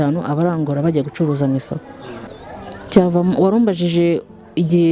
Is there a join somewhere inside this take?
no; 0 cuts

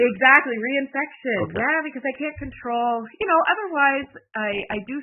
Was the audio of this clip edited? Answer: no; 0 cuts

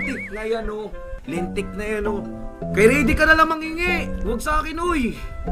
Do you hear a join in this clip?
no; 0 cuts

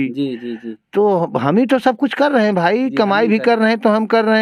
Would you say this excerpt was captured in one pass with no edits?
yes; 0 cuts

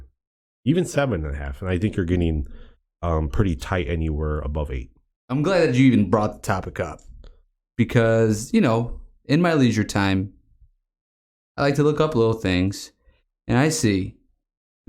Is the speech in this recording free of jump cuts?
no; 1 cut; at 5.3 s

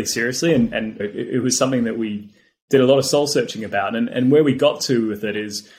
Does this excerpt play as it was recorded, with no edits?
no; 1 cut; at 1.0 s

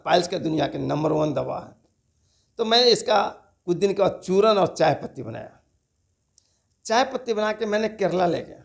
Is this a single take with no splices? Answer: yes; 0 cuts

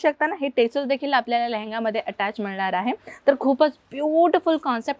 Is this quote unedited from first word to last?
yes; 0 cuts

